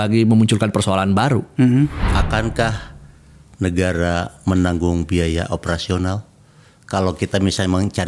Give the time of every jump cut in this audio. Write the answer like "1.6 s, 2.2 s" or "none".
2.1 s